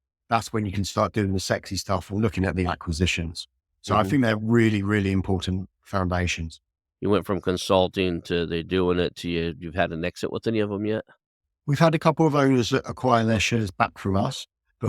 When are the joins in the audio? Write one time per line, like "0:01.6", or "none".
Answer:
0:06.8